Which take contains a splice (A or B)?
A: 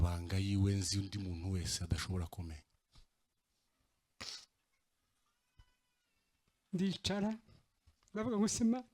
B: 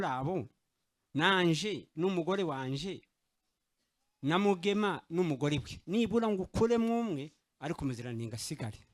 A